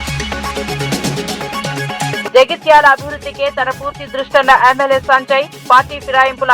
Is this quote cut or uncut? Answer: cut